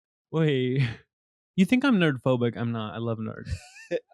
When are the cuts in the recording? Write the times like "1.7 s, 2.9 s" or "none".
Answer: 1.5 s